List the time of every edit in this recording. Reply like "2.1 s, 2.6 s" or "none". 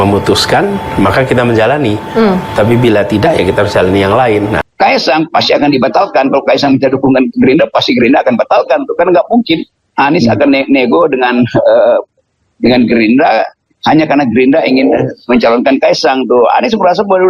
4.6 s